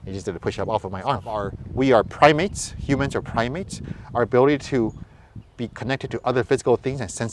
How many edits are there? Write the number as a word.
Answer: one